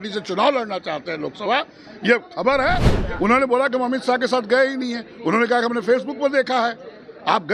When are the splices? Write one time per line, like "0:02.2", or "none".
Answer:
0:02.9